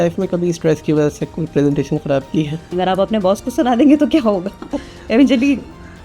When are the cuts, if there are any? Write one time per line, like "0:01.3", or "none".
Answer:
0:02.7